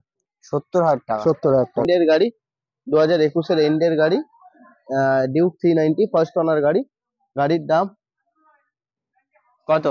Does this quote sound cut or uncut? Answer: cut